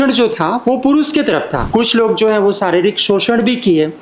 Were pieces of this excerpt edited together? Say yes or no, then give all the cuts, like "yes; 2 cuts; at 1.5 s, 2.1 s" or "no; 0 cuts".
yes; 1 cut; at 1.6 s